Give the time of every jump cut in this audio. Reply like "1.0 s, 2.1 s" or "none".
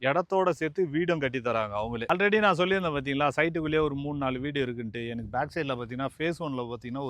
none

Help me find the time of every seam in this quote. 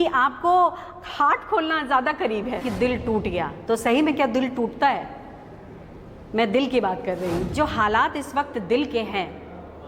2.6 s, 7.5 s

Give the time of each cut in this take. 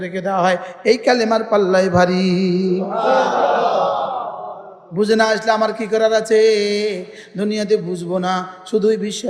none

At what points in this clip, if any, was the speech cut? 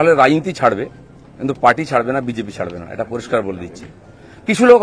none

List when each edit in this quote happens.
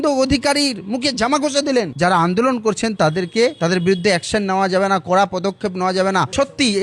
1.9 s

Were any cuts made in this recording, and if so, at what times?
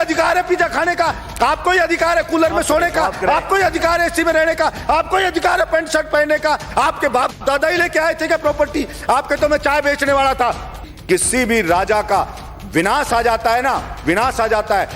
10.9 s

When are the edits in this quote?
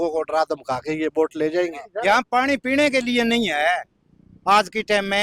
1.8 s

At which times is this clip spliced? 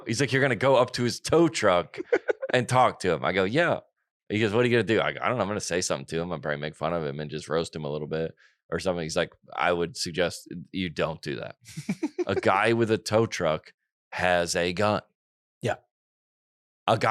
none

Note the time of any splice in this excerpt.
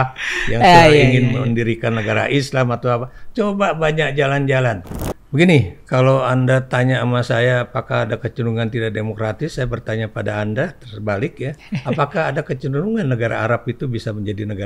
4.9 s

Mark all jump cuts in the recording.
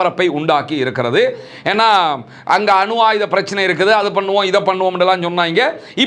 none

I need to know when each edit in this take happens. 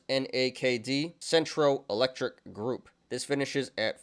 3.0 s

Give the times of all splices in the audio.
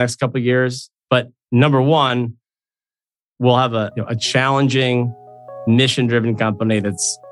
none

